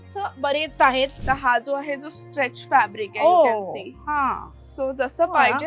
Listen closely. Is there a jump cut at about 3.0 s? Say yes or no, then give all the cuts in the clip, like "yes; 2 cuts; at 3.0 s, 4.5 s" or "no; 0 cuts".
no; 1 cut; at 1.2 s